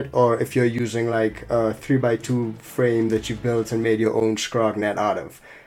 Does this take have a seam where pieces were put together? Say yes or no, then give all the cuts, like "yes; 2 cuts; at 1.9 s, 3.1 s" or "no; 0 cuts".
no; 0 cuts